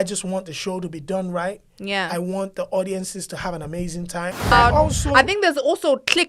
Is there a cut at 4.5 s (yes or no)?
yes